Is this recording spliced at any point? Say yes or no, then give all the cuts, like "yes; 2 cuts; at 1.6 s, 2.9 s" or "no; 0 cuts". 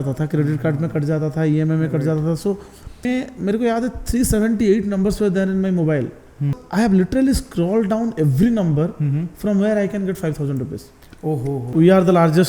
yes; 3 cuts; at 3.1 s, 6.6 s, 11.6 s